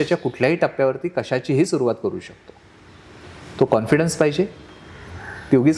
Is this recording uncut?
yes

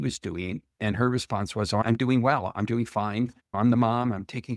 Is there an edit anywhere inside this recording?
yes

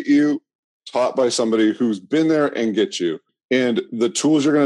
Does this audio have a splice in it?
yes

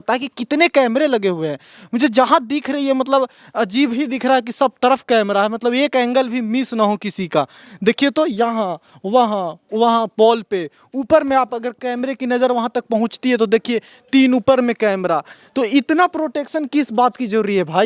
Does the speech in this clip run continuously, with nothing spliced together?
yes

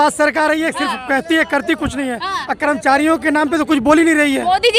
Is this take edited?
no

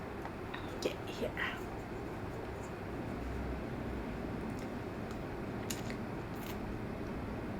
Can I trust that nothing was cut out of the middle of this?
no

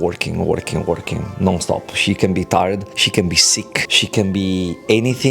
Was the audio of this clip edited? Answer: yes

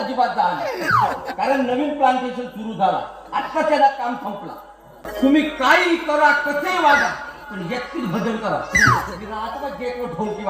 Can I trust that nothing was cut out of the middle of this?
no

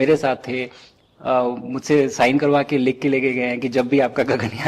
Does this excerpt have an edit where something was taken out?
no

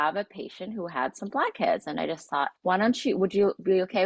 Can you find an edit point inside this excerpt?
yes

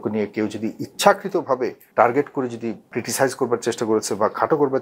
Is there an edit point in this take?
yes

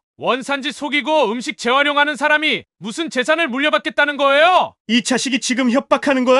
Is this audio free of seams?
no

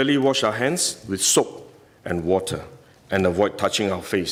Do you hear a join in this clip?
no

